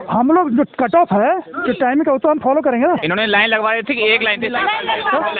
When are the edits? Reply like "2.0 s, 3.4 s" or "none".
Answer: 3.0 s